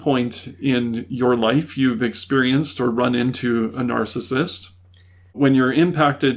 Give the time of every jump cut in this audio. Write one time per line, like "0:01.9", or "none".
0:05.3